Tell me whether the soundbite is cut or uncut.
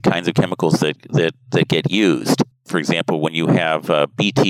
uncut